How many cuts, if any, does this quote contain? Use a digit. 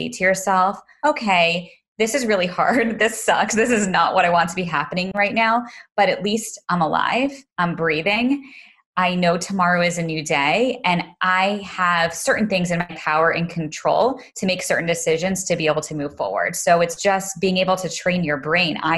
1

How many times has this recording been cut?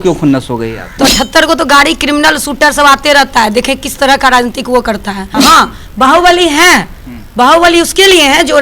2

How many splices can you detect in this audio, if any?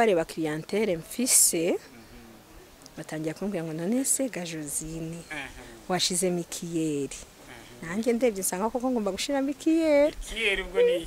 0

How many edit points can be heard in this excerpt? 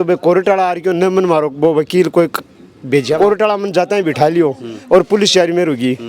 1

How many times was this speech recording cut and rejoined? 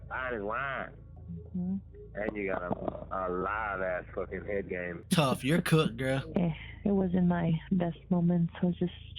1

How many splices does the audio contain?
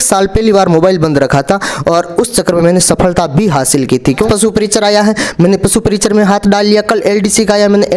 1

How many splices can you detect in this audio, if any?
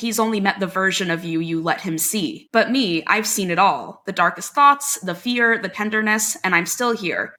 0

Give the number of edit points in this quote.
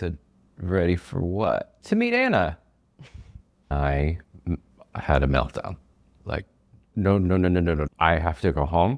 4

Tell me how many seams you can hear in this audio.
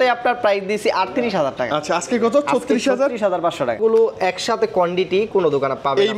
1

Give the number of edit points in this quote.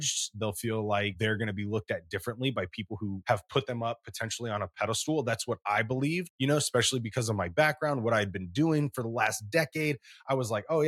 3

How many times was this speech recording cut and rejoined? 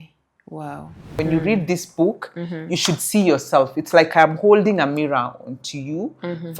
1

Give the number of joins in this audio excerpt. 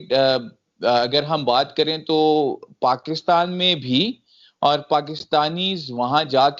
0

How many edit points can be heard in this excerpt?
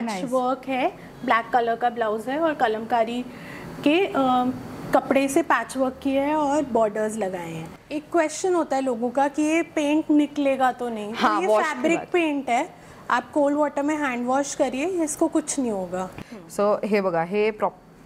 2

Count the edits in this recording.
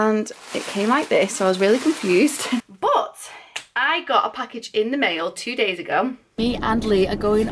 2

